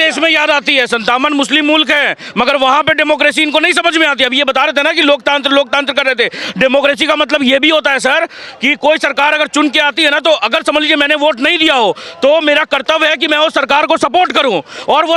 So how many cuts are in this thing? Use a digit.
0